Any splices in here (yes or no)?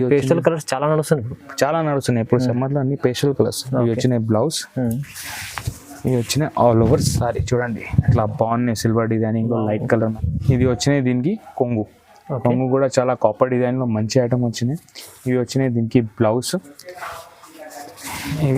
yes